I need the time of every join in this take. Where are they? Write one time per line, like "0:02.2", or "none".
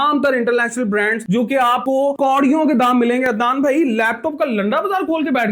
none